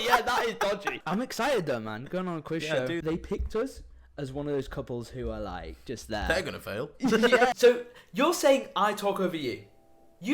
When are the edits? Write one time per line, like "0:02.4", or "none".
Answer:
0:01.0
0:03.0
0:07.5